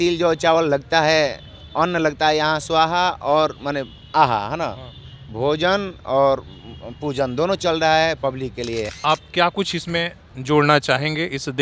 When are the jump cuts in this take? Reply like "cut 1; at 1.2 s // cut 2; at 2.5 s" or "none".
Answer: cut 1; at 8.9 s